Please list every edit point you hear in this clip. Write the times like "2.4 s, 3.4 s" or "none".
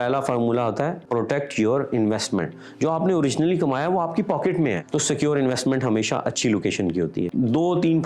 1.0 s, 4.8 s, 7.3 s